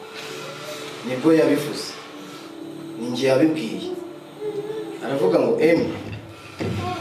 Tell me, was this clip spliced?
yes; 1 cut; at 5.4 s

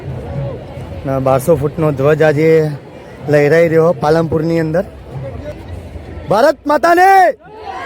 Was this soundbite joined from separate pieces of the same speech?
yes; 1 cut; at 5.5 s

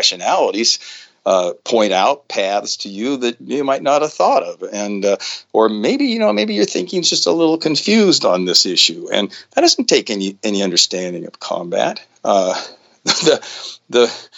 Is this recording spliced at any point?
no; 0 cuts

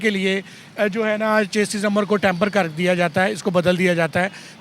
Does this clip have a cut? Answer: no; 0 cuts

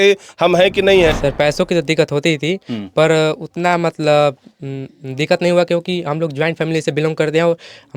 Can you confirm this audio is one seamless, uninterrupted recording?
no; 1 cut; at 1.2 s

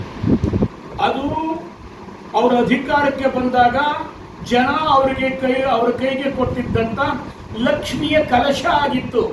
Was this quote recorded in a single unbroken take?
yes; 0 cuts

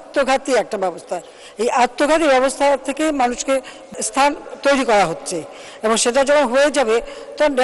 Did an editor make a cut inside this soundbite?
yes; 1 cut; at 3.8 s

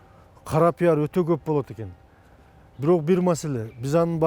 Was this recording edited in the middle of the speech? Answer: no; 0 cuts

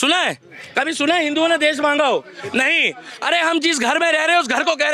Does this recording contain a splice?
no; 0 cuts

